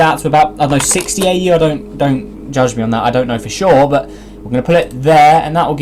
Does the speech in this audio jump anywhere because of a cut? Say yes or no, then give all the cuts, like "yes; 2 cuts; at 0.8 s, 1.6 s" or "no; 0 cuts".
no; 0 cuts